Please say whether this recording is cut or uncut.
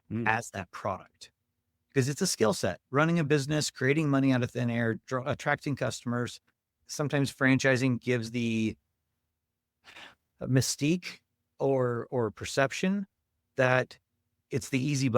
cut